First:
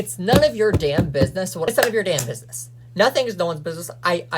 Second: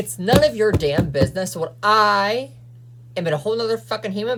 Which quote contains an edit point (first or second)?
first